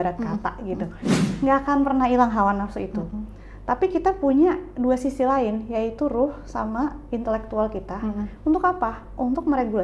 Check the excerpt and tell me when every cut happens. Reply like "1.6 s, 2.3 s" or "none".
1.2 s